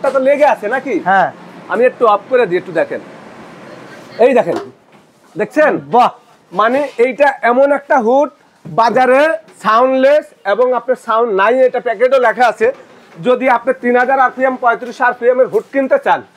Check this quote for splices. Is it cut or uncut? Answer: uncut